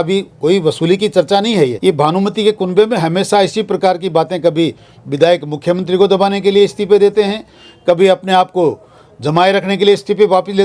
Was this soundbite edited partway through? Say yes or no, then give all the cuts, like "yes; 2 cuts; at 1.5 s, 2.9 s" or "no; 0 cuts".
yes; 1 cut; at 1.8 s